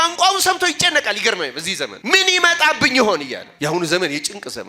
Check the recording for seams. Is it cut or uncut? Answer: cut